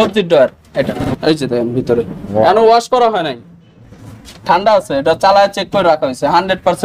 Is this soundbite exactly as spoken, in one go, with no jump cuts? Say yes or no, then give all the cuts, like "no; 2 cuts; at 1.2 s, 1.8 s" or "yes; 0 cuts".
no; 1 cut; at 1.0 s